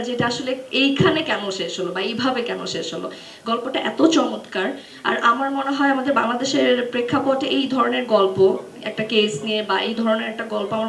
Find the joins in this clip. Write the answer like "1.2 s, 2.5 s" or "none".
none